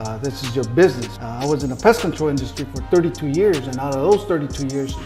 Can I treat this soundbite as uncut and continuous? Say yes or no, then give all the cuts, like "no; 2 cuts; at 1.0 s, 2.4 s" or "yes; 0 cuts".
no; 1 cut; at 1.1 s